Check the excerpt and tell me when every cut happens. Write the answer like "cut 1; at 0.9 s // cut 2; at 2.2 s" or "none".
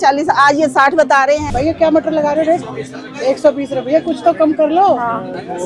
cut 1; at 1.4 s